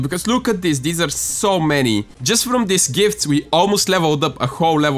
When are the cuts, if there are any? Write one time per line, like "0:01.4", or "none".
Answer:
0:02.2